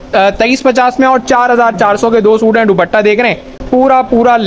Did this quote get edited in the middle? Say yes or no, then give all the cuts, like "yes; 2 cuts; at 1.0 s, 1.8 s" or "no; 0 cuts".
no; 0 cuts